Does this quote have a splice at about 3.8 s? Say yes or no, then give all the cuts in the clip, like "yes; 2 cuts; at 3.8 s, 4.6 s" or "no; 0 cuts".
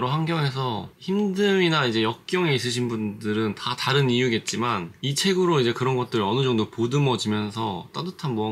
no; 1 cut; at 0.9 s